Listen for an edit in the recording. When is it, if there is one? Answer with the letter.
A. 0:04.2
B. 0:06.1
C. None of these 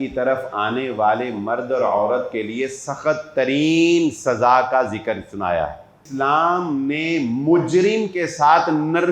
B